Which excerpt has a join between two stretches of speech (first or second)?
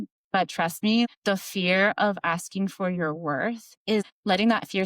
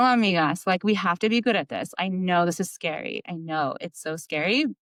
first